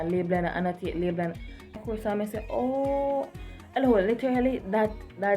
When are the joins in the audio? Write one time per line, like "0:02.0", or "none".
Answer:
0:01.8